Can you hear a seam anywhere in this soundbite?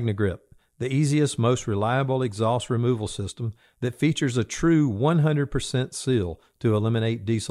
no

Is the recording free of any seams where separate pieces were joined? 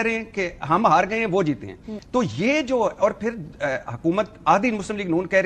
yes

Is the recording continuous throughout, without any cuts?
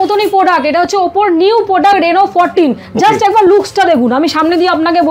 yes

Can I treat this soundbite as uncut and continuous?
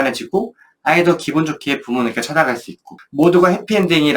no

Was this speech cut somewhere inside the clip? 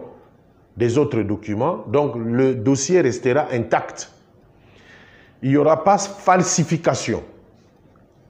no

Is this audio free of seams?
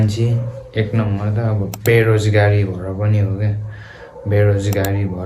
yes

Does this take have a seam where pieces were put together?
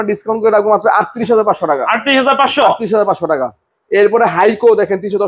no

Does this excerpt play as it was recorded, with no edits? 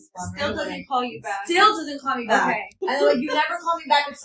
no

